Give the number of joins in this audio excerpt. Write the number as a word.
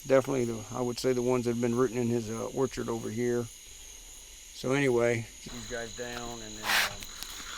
one